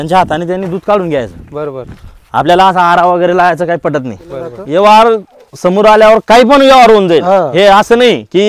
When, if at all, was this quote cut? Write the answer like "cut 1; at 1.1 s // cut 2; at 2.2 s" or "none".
cut 1; at 4.5 s

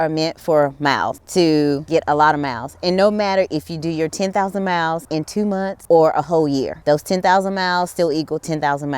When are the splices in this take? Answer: cut 1; at 1.2 s // cut 2; at 1.8 s // cut 3; at 5.4 s // cut 4; at 6.7 s

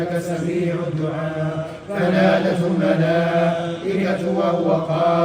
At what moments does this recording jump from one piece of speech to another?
none

